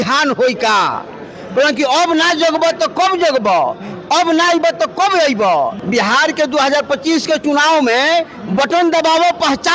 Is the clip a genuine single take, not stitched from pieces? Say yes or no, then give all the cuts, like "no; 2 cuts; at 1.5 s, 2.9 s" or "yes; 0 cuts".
no; 1 cut; at 5.8 s